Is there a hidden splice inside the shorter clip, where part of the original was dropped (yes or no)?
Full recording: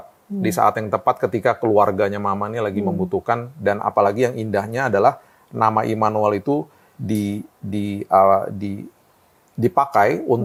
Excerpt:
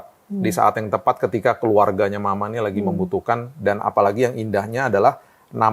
no